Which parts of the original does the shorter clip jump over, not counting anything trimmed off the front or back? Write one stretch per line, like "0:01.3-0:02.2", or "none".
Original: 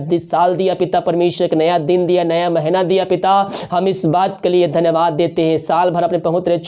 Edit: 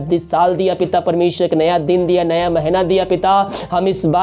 none